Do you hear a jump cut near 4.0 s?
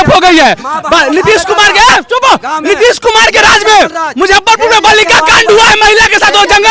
no; 0 cuts

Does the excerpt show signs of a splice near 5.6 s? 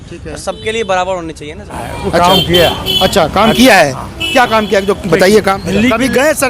yes; 2 cuts; at 1.9 s, 5.6 s

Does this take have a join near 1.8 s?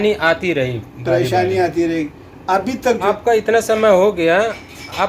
no; 1 cut; at 3.0 s

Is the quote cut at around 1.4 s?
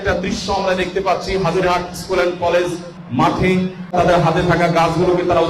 no; 2 cuts; at 3.0 s, 3.9 s

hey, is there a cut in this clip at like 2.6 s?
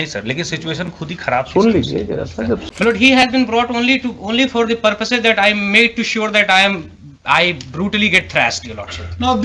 yes; 1 cut; at 2.6 s

